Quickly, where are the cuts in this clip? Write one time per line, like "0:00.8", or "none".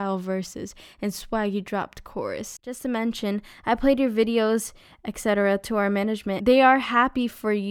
0:02.8
0:06.4